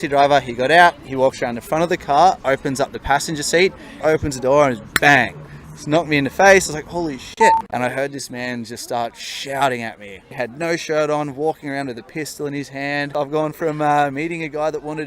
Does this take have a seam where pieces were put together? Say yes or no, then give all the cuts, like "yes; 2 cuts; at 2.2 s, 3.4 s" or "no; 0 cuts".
yes; 4 cuts; at 4.0 s, 7.7 s, 10.2 s, 13.1 s